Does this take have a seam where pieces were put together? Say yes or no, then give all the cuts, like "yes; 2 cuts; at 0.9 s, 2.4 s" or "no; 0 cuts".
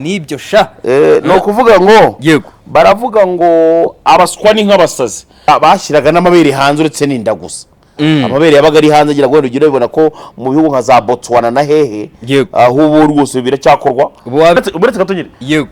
yes; 2 cuts; at 5.5 s, 14.6 s